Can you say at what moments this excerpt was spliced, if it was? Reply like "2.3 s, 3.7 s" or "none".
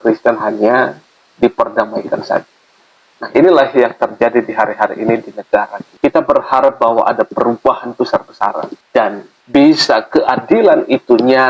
none